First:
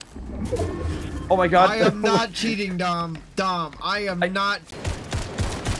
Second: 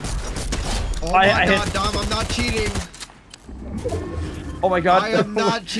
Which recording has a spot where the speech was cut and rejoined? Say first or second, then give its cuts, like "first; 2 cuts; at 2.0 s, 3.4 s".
first; 1 cut; at 4.7 s